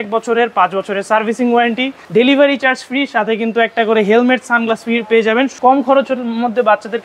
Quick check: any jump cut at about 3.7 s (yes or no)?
no